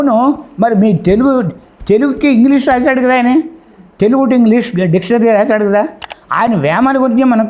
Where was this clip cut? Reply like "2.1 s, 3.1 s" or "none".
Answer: none